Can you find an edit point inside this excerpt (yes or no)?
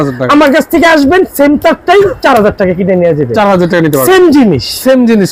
no